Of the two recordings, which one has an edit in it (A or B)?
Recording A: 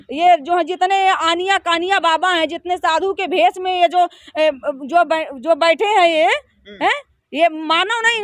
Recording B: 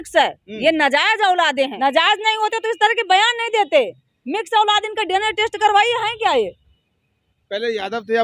B